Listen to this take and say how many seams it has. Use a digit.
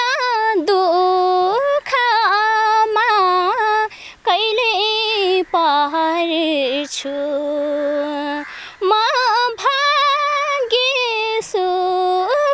0